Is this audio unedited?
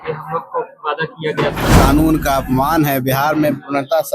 no; 1 cut; at 1.7 s

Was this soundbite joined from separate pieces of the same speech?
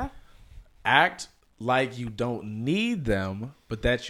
no; 0 cuts

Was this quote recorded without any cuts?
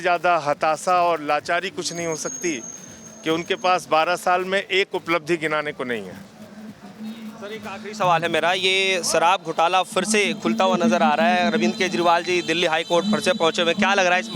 yes; 0 cuts

